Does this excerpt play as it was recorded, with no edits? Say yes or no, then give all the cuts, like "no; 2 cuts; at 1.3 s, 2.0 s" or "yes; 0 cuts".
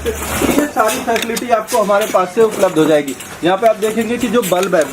yes; 0 cuts